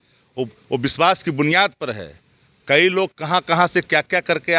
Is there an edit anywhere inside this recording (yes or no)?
no